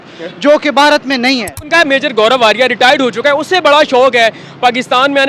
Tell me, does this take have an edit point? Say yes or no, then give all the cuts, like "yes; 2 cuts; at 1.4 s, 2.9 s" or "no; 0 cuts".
yes; 1 cut; at 1.6 s